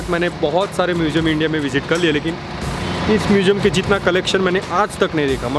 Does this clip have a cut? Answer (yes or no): no